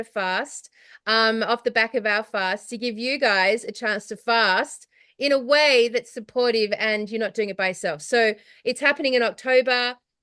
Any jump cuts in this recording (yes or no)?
no